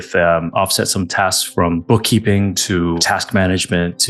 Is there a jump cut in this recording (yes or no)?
yes